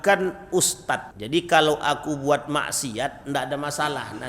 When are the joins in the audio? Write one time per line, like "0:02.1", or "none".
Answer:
0:01.1